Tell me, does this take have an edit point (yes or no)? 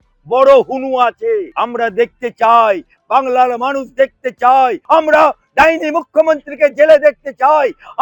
yes